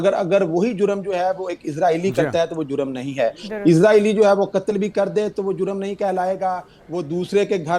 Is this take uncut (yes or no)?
yes